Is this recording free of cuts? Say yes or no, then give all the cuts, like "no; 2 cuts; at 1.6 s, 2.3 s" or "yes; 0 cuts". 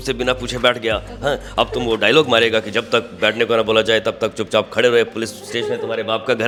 yes; 0 cuts